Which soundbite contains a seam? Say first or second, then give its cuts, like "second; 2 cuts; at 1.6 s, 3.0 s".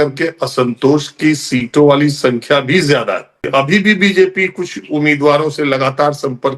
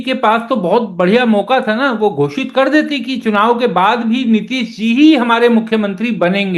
first; 1 cut; at 3.4 s